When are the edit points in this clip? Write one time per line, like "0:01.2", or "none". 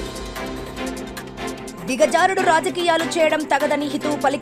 0:01.7